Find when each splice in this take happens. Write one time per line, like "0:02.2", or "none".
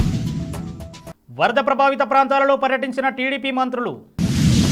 none